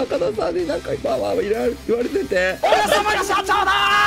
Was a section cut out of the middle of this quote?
yes; 1 cut; at 2.6 s

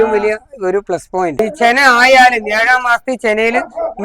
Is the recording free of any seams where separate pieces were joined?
no; 1 cut; at 1.4 s

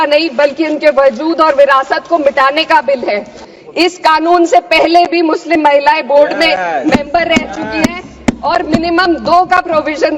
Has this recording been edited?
yes; 1 cut; at 3.4 s

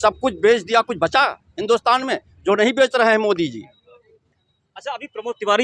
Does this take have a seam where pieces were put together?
no; 0 cuts

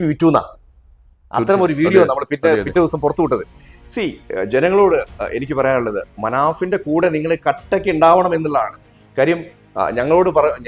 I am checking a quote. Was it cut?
no; 0 cuts

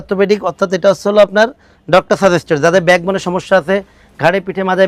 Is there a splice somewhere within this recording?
no; 0 cuts

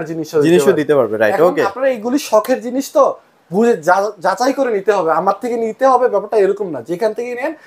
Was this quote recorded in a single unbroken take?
yes; 0 cuts

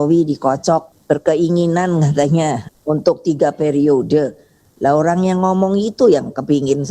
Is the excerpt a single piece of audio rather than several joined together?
no; 2 cuts; at 0.9 s, 2.7 s

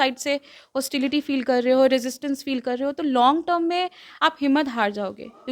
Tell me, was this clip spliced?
no; 0 cuts

